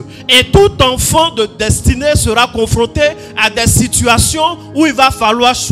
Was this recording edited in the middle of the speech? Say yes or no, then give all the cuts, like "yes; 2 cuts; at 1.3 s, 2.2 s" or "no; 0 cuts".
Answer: no; 0 cuts